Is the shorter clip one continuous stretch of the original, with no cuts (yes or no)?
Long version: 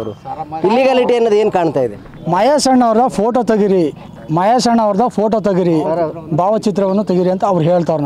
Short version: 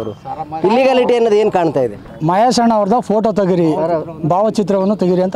no